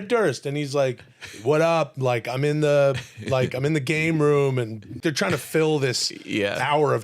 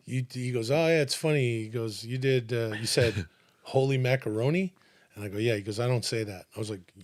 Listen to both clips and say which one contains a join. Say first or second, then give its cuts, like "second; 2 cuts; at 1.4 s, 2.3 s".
first; 1 cut; at 5.0 s